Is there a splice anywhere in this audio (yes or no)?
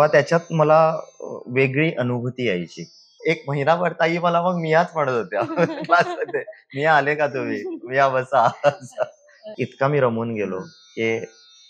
yes